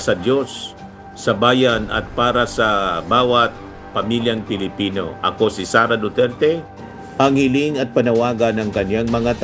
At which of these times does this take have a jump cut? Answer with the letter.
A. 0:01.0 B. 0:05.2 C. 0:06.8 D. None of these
C